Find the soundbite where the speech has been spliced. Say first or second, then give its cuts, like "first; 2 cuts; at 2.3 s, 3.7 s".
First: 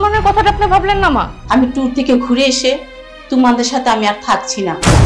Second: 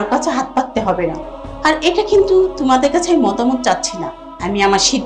first; 1 cut; at 1.4 s